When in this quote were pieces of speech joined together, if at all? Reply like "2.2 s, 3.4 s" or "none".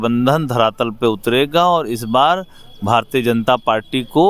none